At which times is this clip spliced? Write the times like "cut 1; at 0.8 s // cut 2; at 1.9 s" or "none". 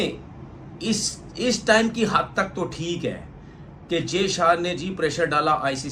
none